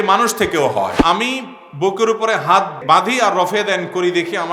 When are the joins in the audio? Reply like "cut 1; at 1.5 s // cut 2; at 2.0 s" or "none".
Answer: cut 1; at 1.0 s // cut 2; at 2.8 s